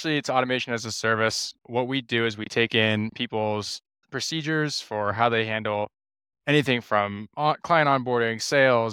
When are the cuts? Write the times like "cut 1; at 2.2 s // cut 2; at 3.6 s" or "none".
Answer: cut 1; at 1.5 s